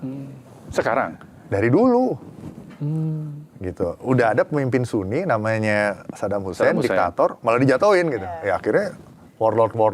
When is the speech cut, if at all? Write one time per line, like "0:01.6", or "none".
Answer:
none